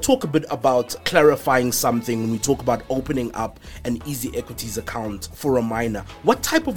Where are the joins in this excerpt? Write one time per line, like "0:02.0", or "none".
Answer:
0:01.0